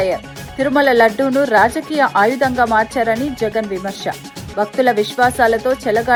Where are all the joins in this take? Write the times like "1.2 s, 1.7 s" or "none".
none